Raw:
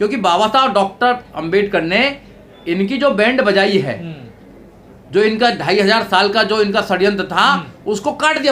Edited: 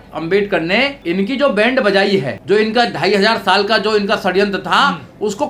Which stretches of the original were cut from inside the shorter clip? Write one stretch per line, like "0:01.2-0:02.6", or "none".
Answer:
0:02.2-0:02.6
0:04.0-0:05.0